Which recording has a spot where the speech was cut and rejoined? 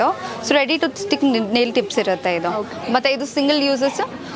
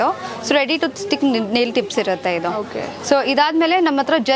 first; 1 cut; at 2.7 s

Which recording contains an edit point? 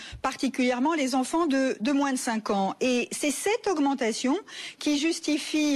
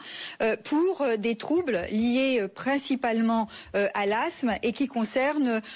second; 1 cut; at 4.6 s

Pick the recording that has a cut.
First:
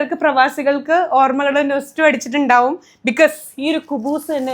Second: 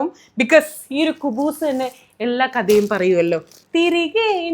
second; 1 cut; at 3.5 s

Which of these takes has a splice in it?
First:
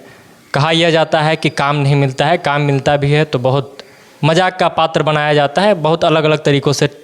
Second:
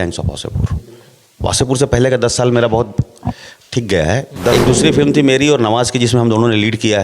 second; 1 cut; at 4.5 s

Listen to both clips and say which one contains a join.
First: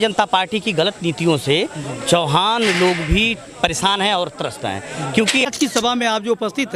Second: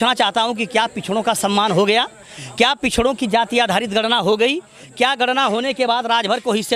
first; 1 cut; at 5.5 s

